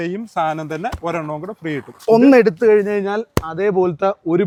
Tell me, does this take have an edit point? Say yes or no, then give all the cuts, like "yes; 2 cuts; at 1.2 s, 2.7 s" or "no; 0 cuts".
no; 0 cuts